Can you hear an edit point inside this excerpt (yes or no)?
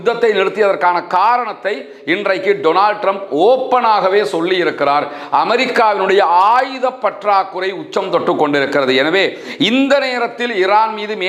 no